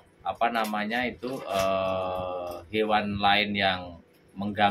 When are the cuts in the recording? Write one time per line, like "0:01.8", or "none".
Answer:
none